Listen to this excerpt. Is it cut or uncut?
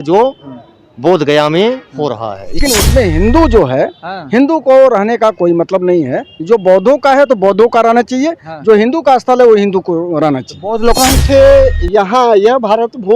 cut